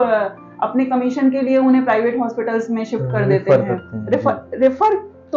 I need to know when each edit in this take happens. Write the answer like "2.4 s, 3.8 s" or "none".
none